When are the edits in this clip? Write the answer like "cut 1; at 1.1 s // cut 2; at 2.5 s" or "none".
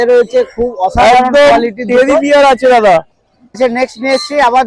cut 1; at 3.6 s